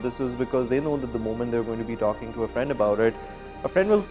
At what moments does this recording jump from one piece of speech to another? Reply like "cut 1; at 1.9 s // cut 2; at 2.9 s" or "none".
none